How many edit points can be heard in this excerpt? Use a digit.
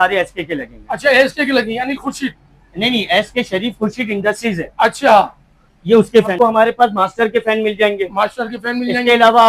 1